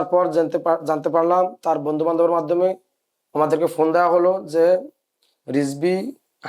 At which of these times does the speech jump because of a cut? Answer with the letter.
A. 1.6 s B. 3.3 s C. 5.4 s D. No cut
D